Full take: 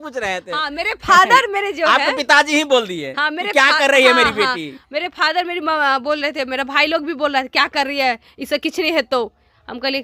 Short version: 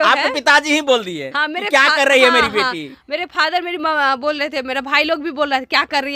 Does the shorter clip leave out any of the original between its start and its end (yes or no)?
no